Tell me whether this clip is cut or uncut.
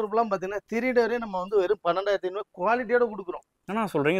uncut